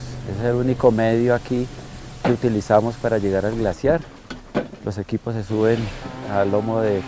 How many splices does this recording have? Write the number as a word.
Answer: zero